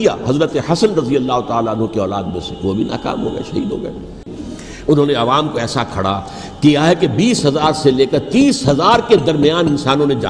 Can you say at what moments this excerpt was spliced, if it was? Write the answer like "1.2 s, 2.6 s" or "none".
4.4 s